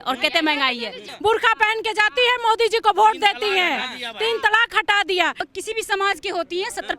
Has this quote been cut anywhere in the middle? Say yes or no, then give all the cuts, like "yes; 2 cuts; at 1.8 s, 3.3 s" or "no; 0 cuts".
yes; 2 cuts; at 1.1 s, 5.5 s